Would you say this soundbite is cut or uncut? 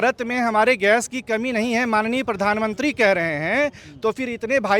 uncut